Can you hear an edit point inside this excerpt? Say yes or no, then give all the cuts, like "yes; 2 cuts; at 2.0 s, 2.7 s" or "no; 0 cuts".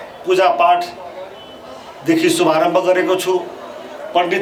no; 0 cuts